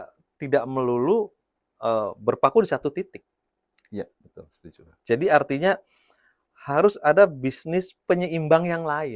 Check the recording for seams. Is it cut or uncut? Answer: uncut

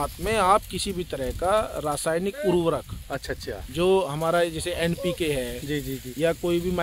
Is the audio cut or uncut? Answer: uncut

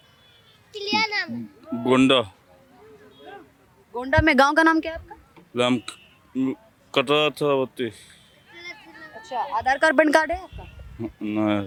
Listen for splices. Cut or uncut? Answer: uncut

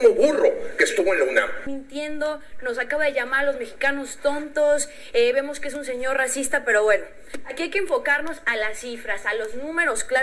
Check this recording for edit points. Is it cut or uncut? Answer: cut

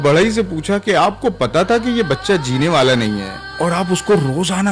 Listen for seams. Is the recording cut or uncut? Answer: uncut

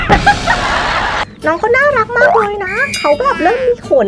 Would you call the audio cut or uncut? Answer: cut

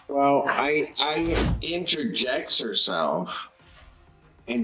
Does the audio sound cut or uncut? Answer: cut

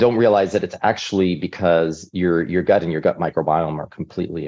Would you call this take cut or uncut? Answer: uncut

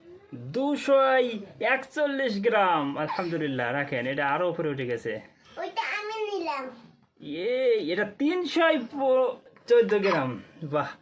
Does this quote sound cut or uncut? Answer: cut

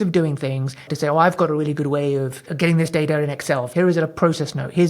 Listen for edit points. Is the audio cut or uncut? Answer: cut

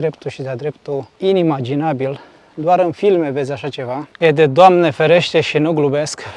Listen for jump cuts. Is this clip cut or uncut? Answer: cut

